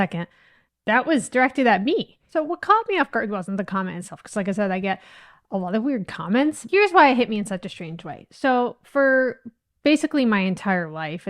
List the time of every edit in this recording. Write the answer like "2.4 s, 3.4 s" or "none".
none